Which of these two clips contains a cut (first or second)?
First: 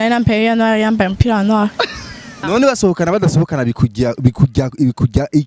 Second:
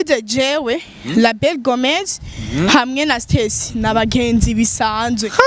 first